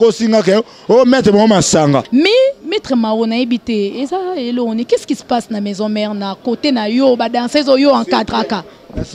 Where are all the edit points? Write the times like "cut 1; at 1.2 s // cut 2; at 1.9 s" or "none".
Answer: cut 1; at 2.1 s